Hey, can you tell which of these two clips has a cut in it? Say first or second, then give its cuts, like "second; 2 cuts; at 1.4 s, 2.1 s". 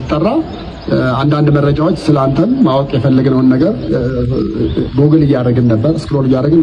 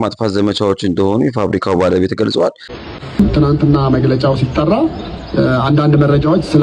second; 1 cut; at 2.8 s